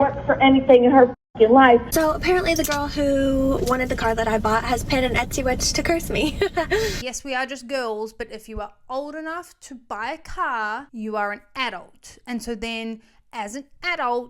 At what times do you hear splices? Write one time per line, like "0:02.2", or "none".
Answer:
0:01.9
0:07.0